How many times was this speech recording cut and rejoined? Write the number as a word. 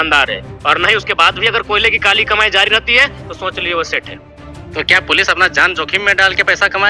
zero